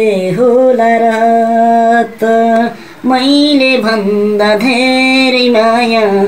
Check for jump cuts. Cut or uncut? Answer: uncut